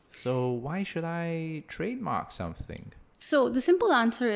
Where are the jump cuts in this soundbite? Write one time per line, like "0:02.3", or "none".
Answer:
0:03.1